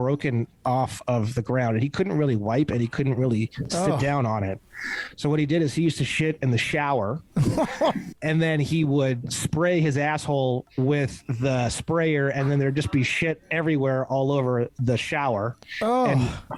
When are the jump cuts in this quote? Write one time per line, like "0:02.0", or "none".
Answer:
none